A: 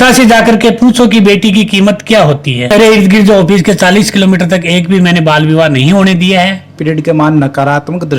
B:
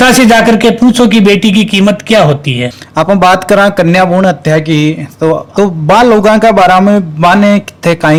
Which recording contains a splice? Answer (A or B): A